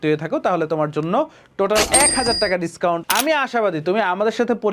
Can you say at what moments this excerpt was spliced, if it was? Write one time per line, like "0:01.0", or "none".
0:03.0